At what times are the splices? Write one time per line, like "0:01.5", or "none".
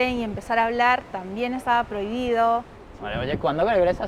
0:02.8